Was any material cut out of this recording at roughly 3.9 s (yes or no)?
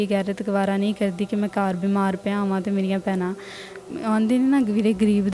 yes